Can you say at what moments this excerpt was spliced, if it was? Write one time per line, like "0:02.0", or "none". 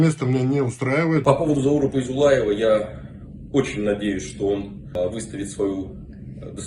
0:01.2
0:05.0